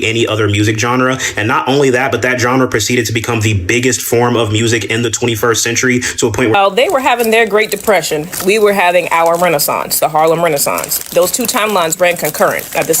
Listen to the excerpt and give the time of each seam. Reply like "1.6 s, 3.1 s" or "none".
6.5 s